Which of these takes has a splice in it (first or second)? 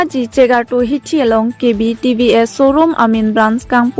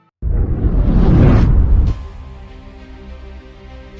second